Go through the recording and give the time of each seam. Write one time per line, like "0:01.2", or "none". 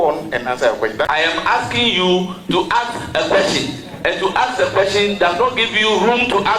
0:01.2